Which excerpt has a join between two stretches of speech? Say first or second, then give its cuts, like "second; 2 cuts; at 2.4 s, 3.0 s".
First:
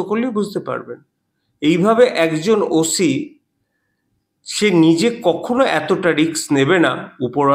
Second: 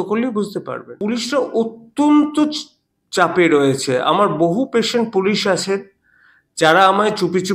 second; 1 cut; at 1.0 s